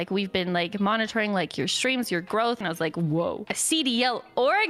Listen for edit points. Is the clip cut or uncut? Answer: cut